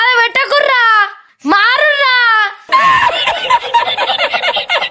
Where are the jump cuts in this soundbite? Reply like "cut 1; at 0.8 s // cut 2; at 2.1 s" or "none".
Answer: none